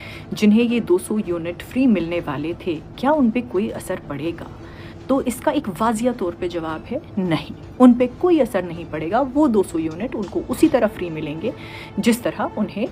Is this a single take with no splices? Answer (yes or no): yes